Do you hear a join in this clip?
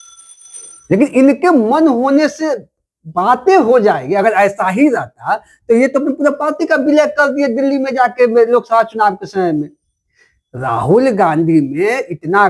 no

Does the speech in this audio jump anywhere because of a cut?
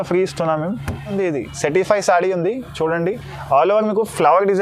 yes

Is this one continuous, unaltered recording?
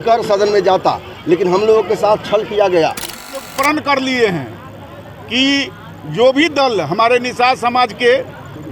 no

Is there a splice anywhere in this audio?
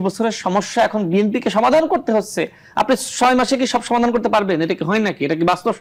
no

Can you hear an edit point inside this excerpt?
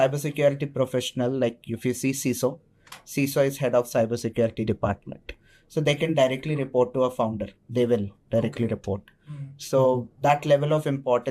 no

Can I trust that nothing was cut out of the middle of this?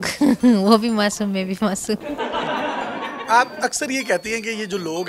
yes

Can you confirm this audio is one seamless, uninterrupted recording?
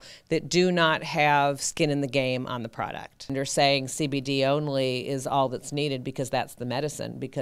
no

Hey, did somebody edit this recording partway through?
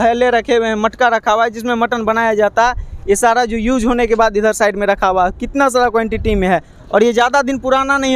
no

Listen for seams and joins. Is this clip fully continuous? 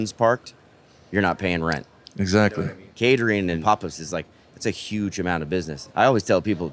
no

